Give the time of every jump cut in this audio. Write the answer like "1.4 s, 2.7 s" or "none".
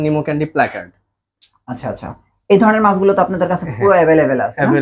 none